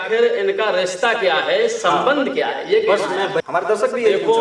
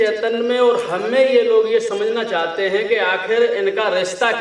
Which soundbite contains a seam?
first; 1 cut; at 3.4 s

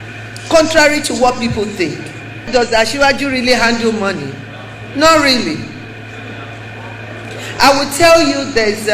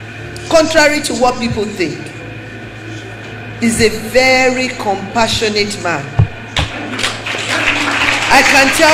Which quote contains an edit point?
first; 1 cut; at 2.5 s

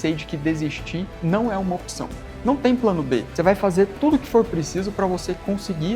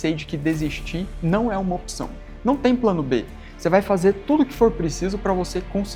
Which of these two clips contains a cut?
first; 1 cut; at 3.3 s

